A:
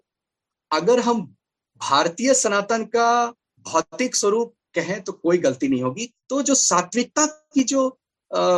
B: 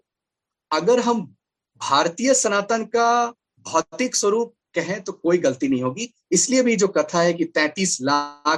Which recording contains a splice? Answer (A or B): A